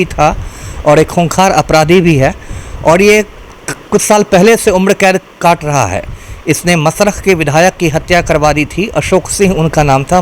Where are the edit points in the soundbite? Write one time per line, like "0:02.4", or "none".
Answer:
none